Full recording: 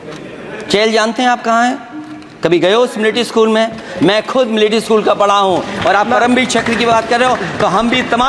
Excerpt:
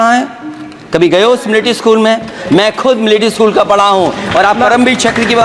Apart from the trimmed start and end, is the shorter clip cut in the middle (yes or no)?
no